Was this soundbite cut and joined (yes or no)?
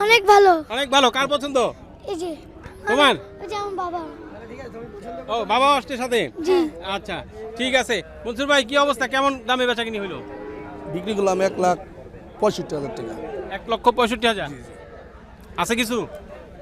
no